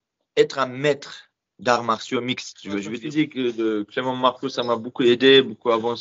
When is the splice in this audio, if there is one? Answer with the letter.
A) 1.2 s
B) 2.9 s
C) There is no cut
B